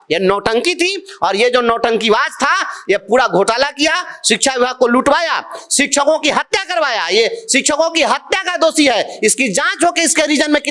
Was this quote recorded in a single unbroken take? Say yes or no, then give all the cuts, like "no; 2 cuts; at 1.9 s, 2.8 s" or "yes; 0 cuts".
yes; 0 cuts